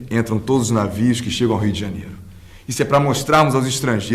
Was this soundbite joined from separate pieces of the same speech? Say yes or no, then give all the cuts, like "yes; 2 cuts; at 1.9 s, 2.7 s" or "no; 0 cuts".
no; 0 cuts